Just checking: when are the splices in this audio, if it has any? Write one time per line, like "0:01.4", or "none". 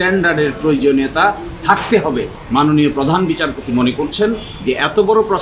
0:02.3